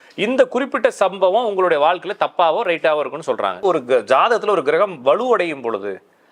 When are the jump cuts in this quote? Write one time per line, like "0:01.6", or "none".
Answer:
0:03.6